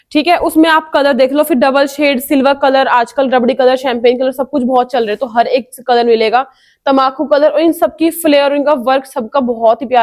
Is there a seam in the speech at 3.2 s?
no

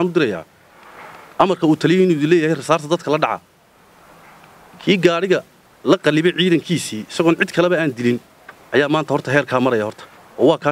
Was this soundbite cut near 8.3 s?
no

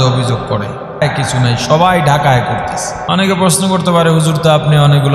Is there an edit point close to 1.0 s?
yes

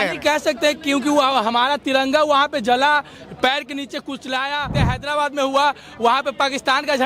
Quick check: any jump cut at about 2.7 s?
no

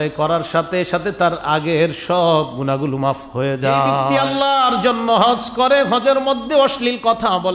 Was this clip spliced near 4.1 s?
yes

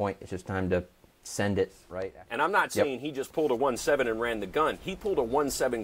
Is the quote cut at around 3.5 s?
no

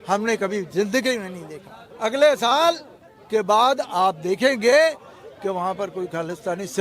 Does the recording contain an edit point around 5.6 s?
no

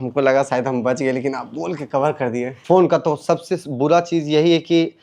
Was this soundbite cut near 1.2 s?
no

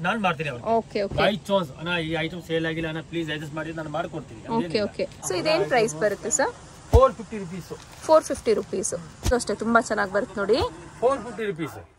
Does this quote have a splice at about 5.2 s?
yes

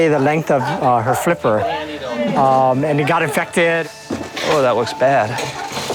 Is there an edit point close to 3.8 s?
yes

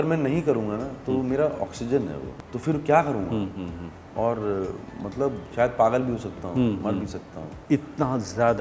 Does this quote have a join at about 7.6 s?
no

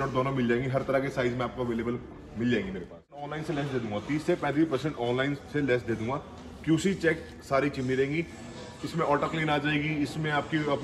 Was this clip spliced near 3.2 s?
yes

